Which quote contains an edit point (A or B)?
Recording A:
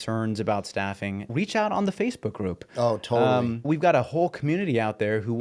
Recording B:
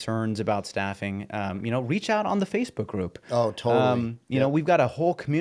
A